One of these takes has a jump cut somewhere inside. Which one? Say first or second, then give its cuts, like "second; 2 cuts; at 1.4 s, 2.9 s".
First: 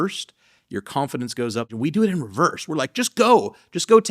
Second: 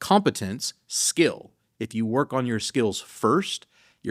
first; 1 cut; at 1.7 s